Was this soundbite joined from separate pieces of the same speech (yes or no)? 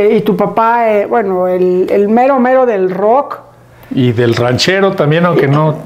no